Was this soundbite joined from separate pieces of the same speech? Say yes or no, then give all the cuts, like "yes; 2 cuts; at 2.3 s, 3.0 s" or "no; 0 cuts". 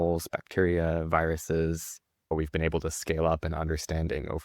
yes; 1 cut; at 2.3 s